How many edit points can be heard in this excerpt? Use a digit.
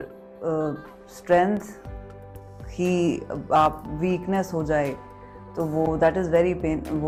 0